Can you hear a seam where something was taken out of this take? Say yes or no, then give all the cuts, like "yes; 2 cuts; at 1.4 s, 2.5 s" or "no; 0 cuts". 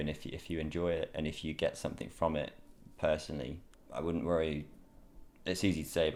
no; 0 cuts